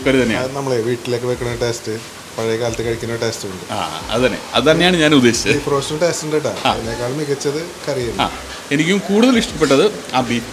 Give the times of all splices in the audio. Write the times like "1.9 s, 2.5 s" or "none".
none

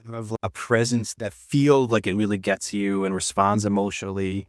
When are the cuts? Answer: 1.1 s

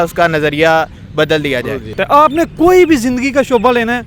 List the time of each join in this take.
1.9 s

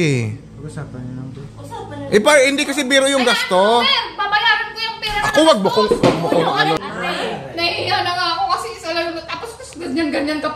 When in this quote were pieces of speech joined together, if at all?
6.8 s

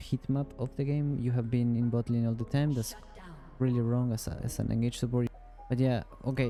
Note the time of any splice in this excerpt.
none

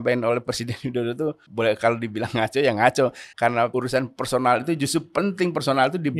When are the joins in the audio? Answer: 1.4 s, 3.5 s

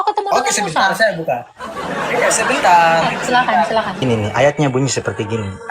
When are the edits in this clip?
4.0 s

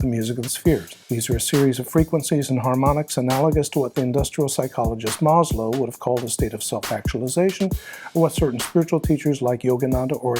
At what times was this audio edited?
1.0 s

